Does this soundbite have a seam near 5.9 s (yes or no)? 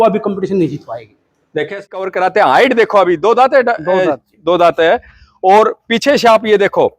no